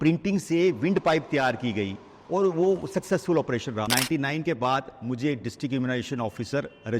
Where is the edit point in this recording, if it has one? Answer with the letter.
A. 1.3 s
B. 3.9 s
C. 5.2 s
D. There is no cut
B